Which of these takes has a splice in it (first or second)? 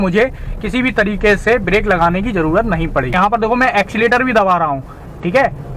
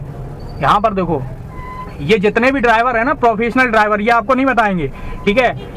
first